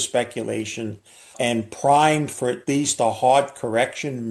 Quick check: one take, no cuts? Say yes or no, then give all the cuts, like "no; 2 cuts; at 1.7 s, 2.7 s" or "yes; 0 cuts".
no; 1 cut; at 1.3 s